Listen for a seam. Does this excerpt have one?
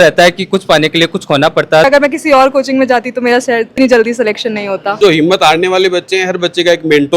yes; 2 cuts; at 1.8 s, 4.9 s

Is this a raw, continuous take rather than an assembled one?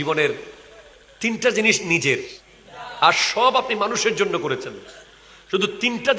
yes; 0 cuts

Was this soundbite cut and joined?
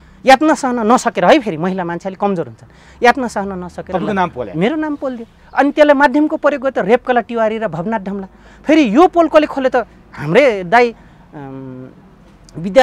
no; 0 cuts

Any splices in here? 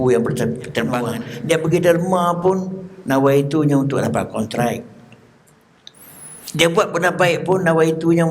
yes; 1 cut; at 1.0 s

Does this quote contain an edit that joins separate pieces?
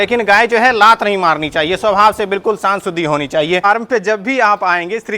yes; 1 cut; at 3.6 s

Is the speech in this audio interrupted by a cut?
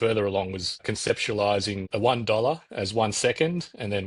yes; 2 cuts; at 0.8 s, 1.8 s

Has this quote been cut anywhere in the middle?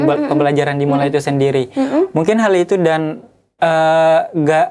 no; 0 cuts

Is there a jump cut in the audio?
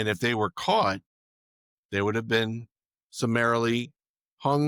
no; 0 cuts

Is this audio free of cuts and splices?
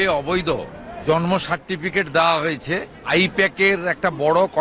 no; 2 cuts; at 0.9 s, 3.0 s

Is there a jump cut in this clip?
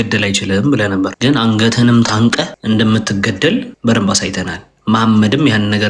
yes; 3 cuts; at 1.1 s, 2.5 s, 3.7 s

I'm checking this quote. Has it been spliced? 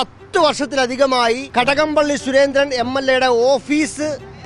yes; 1 cut; at 1.4 s

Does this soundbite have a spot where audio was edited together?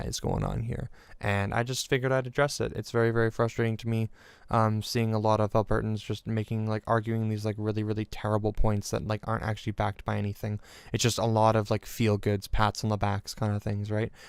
no; 0 cuts

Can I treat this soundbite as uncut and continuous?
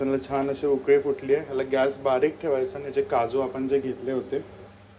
yes; 0 cuts

